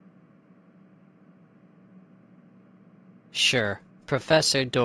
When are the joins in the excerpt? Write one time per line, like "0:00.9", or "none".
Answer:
0:01.2
0:03.4